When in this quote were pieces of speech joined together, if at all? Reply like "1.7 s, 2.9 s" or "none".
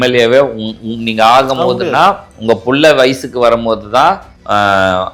none